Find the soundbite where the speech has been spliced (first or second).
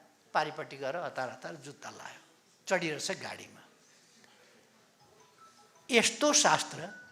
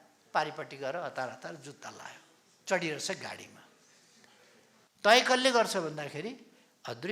second